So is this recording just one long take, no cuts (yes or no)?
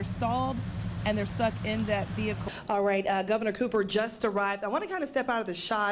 no